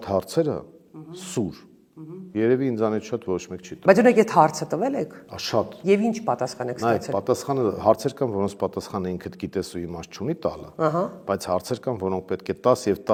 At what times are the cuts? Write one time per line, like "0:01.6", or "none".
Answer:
none

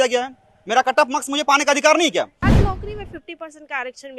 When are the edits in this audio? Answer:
0:02.4

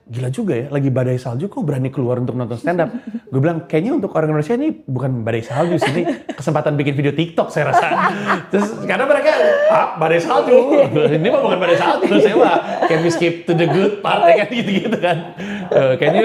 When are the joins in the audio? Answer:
none

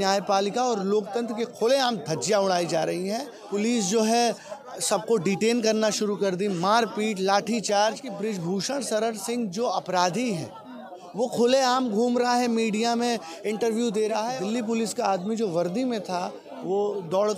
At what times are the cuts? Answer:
0:03.3
0:08.1
0:14.3

